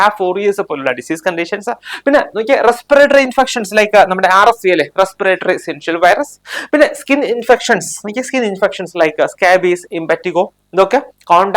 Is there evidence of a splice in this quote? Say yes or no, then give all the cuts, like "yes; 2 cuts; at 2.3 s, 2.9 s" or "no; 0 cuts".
no; 0 cuts